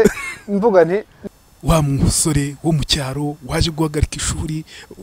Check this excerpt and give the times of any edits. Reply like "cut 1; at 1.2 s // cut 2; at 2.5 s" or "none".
cut 1; at 1.1 s